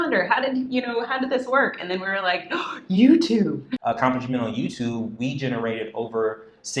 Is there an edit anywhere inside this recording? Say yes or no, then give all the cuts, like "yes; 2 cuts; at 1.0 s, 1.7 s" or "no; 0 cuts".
yes; 1 cut; at 3.7 s